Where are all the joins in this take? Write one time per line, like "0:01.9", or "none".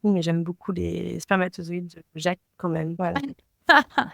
none